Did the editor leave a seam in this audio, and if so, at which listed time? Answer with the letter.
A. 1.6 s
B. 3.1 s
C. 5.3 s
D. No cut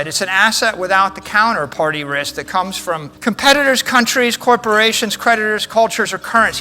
B